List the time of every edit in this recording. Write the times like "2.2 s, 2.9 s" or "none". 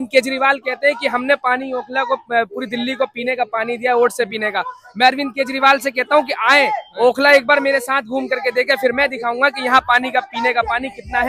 none